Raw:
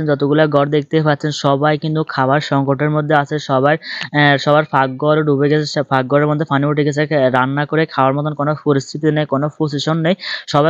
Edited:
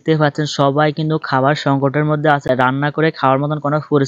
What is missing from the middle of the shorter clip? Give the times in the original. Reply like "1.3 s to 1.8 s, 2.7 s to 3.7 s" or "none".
3.3 s to 7.2 s

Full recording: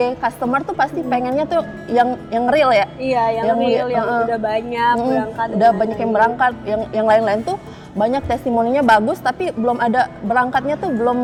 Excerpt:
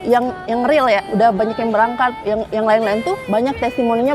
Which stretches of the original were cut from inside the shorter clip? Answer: 2.9 s to 5.5 s, 7.6 s to 7.9 s

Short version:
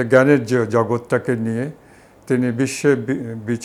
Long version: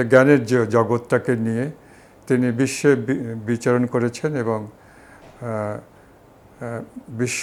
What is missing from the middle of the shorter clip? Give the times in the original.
none

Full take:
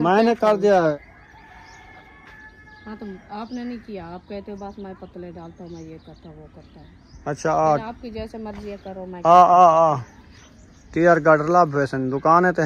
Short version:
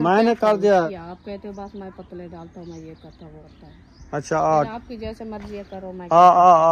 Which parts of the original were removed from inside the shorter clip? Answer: 0.9 s to 3.9 s, 6.5 s to 6.6 s

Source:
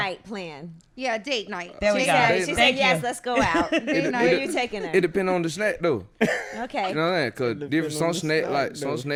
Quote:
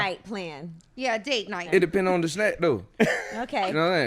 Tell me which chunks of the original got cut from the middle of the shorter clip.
1.6 s to 4.8 s

